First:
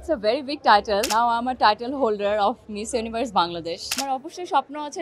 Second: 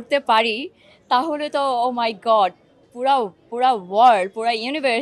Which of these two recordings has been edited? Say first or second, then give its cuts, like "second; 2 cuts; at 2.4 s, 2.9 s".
first; 2 cuts; at 1.1 s, 4.0 s